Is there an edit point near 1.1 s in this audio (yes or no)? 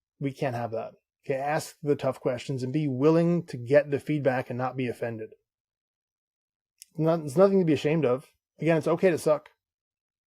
yes